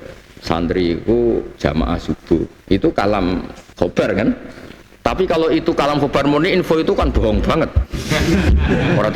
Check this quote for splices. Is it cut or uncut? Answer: cut